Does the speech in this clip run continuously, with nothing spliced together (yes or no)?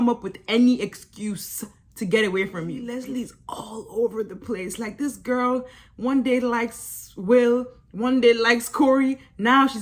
no